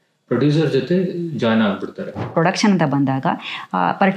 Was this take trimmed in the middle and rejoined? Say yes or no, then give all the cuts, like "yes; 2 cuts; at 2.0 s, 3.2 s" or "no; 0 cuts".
yes; 1 cut; at 2.3 s